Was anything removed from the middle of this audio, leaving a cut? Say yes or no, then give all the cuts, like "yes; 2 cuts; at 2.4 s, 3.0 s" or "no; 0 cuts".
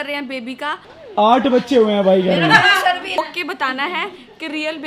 yes; 2 cuts; at 1.0 s, 3.2 s